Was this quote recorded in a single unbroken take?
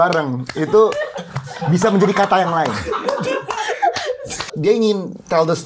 no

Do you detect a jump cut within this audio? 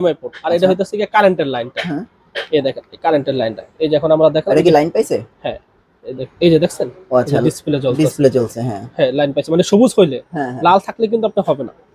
no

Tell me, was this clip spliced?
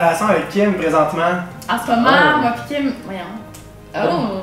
no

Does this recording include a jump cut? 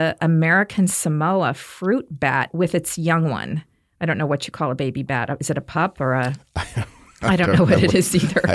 yes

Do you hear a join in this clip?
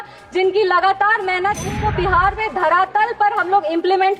yes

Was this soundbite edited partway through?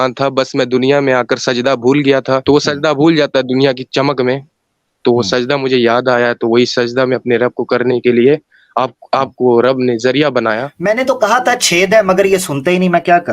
yes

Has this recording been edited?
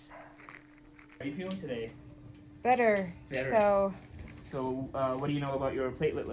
yes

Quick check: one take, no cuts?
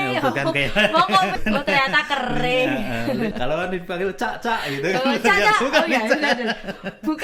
no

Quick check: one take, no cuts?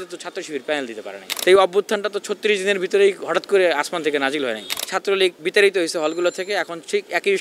no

